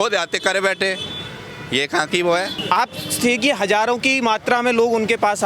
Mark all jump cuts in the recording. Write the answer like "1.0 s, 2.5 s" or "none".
2.6 s